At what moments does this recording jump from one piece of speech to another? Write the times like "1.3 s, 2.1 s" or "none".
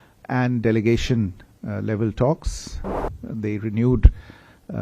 3.2 s